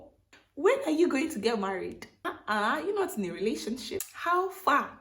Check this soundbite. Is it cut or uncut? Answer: cut